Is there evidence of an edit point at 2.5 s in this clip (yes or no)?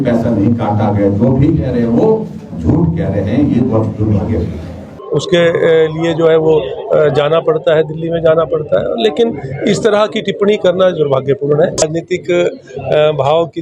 no